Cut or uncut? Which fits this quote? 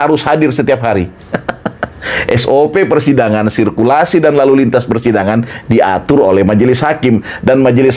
uncut